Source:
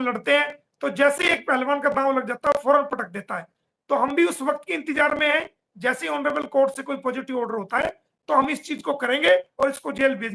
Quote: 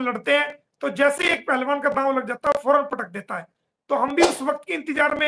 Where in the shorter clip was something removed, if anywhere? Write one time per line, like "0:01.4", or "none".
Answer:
none